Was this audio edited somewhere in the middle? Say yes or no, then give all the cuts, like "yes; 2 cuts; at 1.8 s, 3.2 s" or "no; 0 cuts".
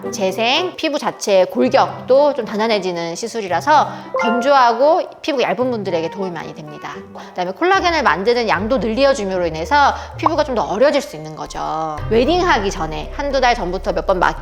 yes; 3 cuts; at 0.8 s, 7.3 s, 11.9 s